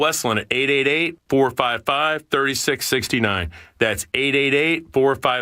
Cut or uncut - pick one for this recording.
uncut